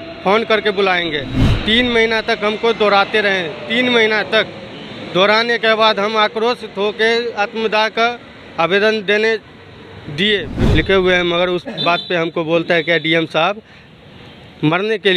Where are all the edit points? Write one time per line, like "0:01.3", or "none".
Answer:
0:10.5

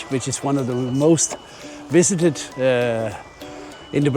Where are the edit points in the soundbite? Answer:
none

